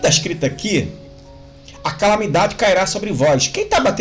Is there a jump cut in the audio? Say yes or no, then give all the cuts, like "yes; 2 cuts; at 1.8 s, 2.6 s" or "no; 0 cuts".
no; 0 cuts